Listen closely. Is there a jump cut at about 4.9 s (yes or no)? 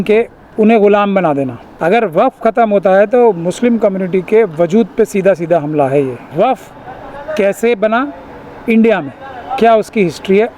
no